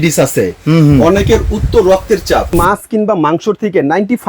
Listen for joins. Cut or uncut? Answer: cut